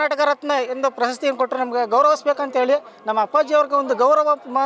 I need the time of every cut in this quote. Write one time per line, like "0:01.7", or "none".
none